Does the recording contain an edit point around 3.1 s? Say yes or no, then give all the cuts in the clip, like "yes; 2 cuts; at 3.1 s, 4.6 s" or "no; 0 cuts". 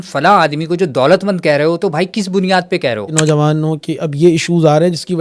yes; 1 cut; at 3.1 s